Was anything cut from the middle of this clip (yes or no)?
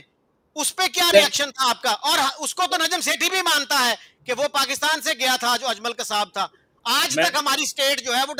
no